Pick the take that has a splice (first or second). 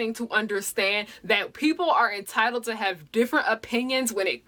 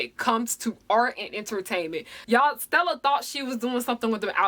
second